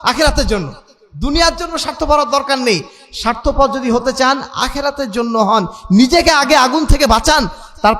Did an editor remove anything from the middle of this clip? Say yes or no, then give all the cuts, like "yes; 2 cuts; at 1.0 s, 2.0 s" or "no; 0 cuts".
no; 0 cuts